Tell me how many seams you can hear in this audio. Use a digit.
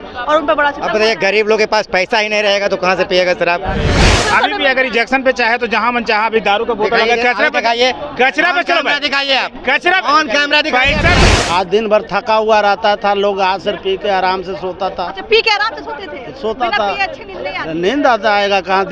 2